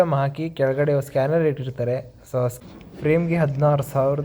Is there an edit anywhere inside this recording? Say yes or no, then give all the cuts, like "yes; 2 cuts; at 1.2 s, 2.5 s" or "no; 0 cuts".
yes; 1 cut; at 2.6 s